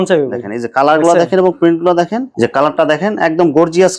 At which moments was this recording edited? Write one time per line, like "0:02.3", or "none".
0:02.3